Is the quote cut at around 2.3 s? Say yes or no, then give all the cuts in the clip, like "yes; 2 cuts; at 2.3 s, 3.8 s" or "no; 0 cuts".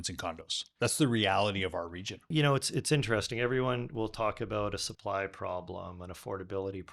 yes; 1 cut; at 2.3 s